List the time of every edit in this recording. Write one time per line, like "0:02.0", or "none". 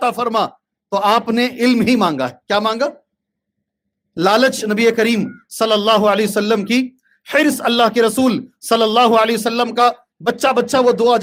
none